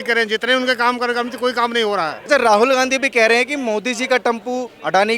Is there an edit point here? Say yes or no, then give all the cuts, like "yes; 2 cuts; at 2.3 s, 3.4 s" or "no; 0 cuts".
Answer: yes; 1 cut; at 2.2 s